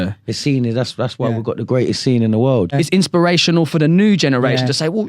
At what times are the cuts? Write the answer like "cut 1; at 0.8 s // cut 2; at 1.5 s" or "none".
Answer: cut 1; at 2.7 s